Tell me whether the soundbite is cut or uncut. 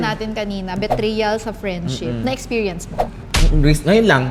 uncut